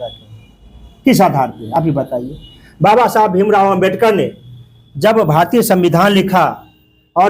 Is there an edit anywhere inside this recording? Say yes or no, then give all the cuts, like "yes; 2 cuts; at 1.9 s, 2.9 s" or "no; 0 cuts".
no; 0 cuts